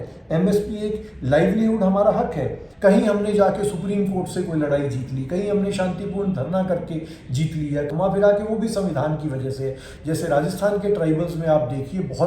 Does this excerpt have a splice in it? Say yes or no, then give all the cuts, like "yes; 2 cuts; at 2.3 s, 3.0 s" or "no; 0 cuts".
yes; 3 cuts; at 2.6 s, 7.9 s, 9.9 s